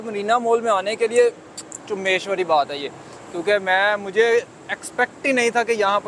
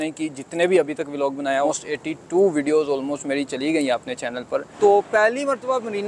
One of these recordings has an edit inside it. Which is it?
second; 2 cuts; at 1.7 s, 4.7 s

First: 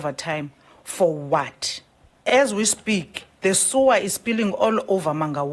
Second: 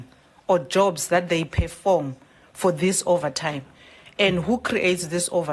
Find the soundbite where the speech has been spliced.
first; 1 cut; at 2.2 s

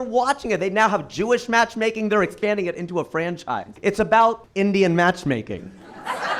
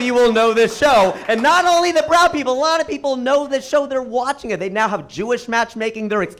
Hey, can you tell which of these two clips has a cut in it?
first; 2 cuts; at 3.7 s, 4.4 s

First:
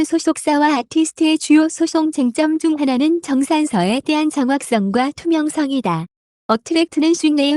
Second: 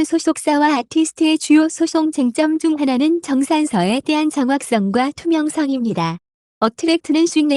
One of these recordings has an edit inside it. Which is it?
first; 1 cut; at 5.6 s

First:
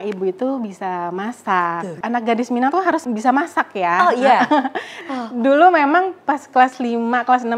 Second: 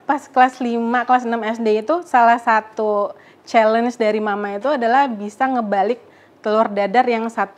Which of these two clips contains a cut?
first; 3 cuts; at 2.0 s, 3.0 s, 5.0 s

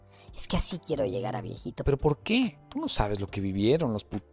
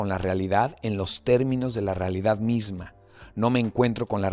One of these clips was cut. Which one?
first; 1 cut; at 2.6 s

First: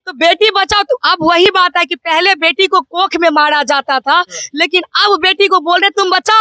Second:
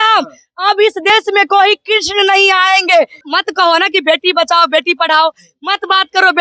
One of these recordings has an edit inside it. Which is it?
second; 1 cut; at 3.3 s

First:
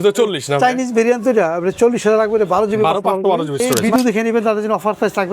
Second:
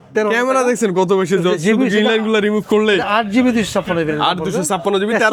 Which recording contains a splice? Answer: first; 1 cut; at 3.7 s

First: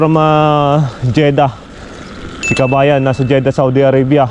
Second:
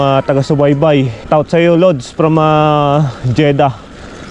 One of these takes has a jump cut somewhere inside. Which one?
second; 1 cut; at 1.3 s

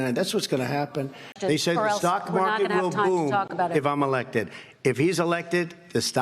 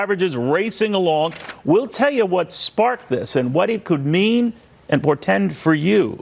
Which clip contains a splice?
first; 1 cut; at 1.2 s

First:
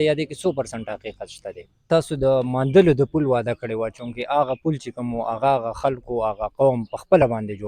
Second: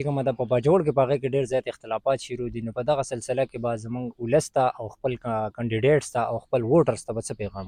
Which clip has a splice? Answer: first; 1 cut; at 1.9 s

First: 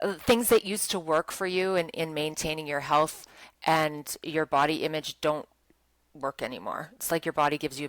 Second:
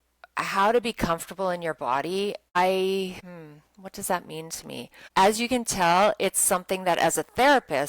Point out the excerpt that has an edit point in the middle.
second; 3 cuts; at 2.6 s, 3.3 s, 4.9 s

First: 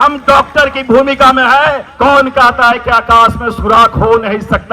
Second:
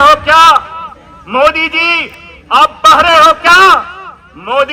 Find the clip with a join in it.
first; 1 cut; at 1.9 s

